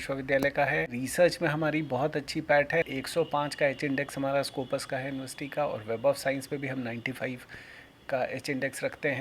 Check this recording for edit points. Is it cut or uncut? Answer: cut